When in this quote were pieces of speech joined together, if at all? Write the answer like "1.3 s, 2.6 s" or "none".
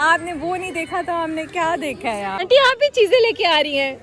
2.3 s